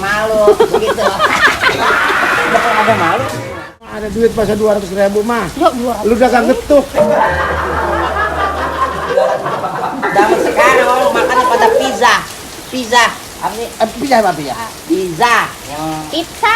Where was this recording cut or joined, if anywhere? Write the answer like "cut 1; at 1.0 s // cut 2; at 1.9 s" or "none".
cut 1; at 3.9 s